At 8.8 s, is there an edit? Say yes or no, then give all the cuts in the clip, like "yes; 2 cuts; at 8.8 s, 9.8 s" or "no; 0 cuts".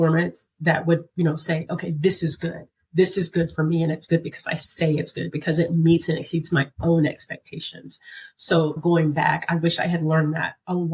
yes; 1 cut; at 8.8 s